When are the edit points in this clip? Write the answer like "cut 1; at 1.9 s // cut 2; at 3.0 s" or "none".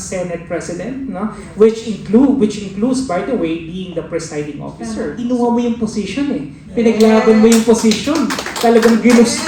cut 1; at 5.1 s